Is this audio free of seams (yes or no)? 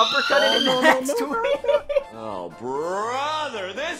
no